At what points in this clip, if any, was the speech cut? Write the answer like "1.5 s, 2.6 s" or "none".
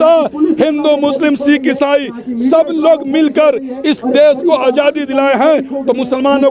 none